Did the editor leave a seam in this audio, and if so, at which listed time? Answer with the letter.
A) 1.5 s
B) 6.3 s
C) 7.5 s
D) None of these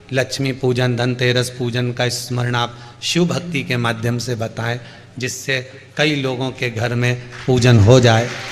D